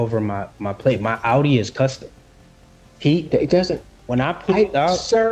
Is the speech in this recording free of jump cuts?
yes; 0 cuts

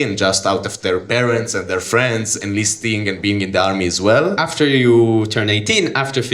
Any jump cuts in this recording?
yes; 1 cut; at 4.5 s

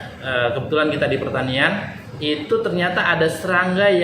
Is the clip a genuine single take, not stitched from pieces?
yes; 0 cuts

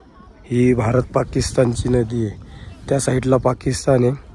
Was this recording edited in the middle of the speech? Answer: no; 0 cuts

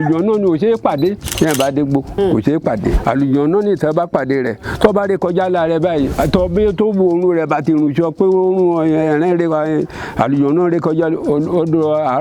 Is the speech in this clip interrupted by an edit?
yes; 4 cuts; at 1.3 s, 2.1 s, 3.0 s, 6.1 s

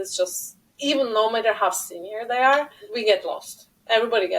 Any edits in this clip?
yes; 1 cut; at 2.8 s

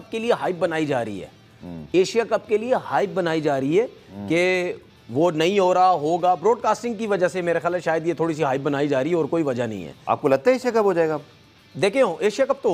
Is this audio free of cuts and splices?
yes; 0 cuts

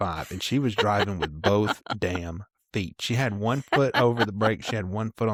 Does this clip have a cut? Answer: no; 0 cuts

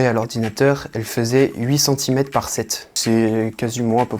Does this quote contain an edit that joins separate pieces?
yes; 1 cut; at 2.9 s

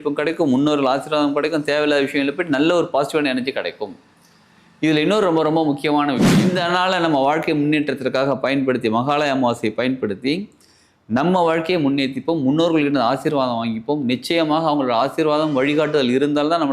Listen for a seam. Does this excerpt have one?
yes; 1 cut; at 6.3 s

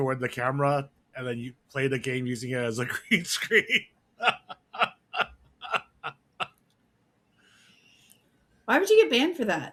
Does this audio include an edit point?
no; 0 cuts

